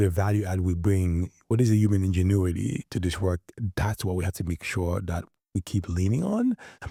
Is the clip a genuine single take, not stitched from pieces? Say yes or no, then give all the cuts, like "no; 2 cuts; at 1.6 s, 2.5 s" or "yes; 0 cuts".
yes; 0 cuts